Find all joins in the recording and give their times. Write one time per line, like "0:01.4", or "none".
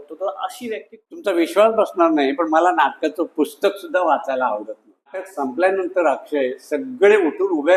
0:00.9
0:05.3